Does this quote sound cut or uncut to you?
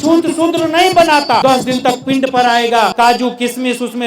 cut